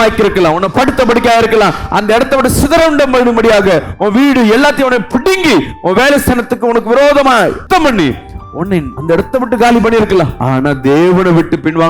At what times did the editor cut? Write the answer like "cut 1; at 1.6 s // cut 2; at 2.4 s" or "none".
cut 1; at 7.6 s // cut 2; at 8.9 s // cut 3; at 10.4 s